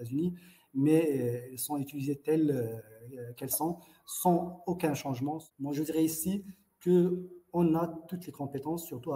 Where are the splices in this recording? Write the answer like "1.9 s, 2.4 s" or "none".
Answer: 5.4 s